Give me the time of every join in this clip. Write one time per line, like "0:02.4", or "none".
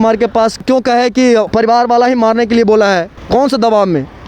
0:03.2